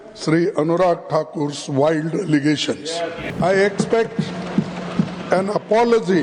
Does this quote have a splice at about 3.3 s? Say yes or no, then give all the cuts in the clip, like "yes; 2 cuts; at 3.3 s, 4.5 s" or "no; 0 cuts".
yes; 1 cut; at 3.3 s